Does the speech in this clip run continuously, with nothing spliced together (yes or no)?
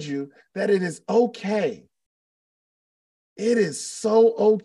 yes